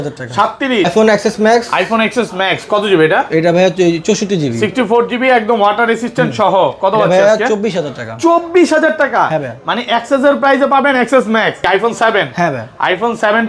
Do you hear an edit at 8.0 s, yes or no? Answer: no